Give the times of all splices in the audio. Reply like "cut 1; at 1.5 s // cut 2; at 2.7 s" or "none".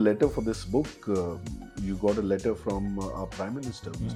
none